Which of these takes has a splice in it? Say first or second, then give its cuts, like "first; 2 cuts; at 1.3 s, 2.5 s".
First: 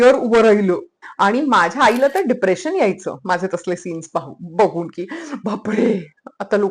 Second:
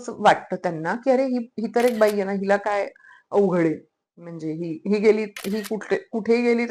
first; 1 cut; at 1.0 s